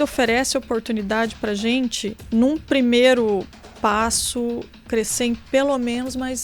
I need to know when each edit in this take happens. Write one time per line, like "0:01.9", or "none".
none